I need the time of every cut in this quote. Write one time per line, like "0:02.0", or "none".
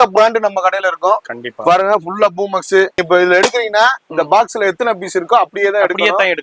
0:03.0